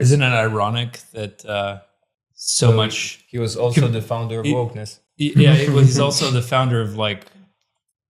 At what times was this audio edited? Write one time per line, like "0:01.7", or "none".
none